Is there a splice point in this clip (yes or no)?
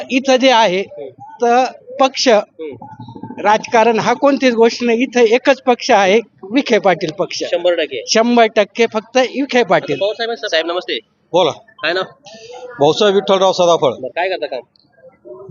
no